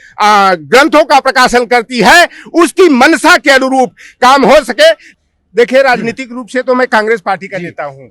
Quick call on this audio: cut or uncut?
cut